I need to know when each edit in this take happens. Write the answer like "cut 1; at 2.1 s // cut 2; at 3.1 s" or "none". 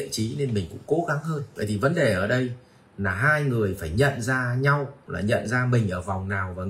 cut 1; at 1.5 s // cut 2; at 5.0 s